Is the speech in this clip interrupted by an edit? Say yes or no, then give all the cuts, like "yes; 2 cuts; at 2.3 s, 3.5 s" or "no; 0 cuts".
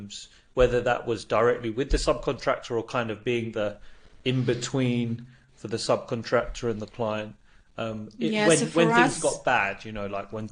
no; 0 cuts